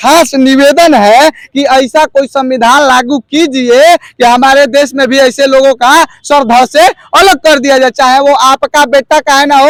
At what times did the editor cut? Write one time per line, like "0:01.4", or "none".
none